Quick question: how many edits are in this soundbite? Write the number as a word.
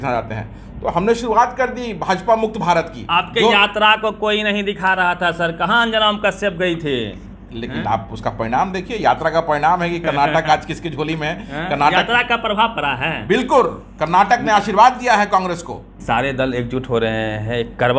two